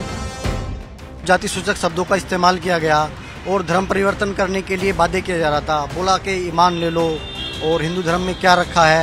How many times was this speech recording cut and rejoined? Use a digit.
1